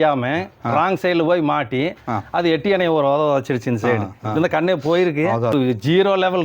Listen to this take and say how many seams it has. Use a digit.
1